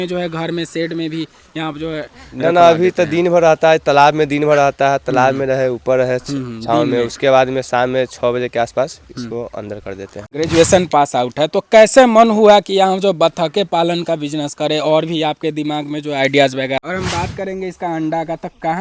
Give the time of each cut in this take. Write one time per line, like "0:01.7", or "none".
0:10.2
0:16.8